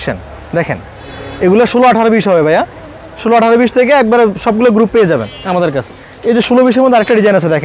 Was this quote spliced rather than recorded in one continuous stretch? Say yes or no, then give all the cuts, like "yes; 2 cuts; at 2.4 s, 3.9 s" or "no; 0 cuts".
no; 0 cuts